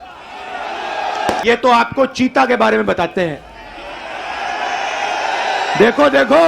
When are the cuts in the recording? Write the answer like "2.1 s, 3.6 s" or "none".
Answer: 1.4 s